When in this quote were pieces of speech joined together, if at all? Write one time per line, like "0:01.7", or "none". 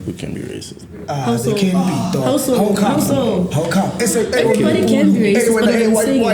none